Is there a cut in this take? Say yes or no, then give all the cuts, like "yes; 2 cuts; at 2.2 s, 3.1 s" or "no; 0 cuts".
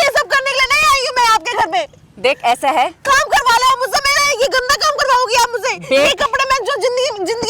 no; 0 cuts